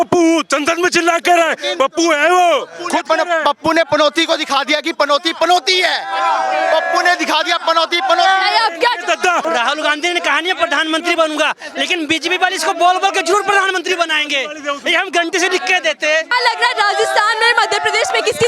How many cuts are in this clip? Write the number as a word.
two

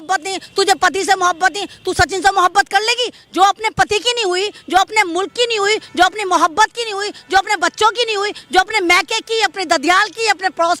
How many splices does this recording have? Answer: zero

